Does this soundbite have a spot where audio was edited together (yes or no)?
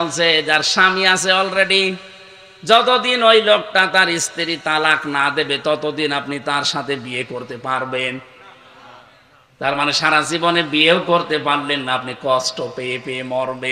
no